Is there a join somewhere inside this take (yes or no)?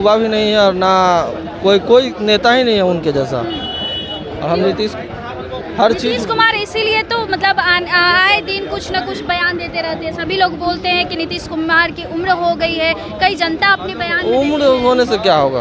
no